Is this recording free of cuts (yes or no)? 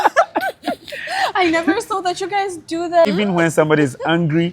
no